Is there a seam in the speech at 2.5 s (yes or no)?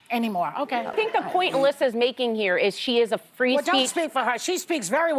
no